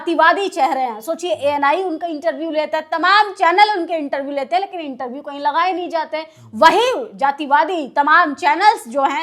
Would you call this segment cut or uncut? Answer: uncut